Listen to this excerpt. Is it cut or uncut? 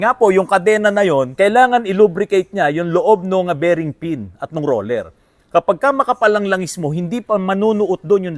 cut